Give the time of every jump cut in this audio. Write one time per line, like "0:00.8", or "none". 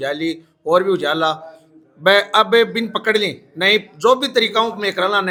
none